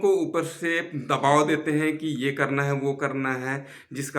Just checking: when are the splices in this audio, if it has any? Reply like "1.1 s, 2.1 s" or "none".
none